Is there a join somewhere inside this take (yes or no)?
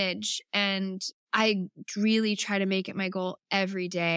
yes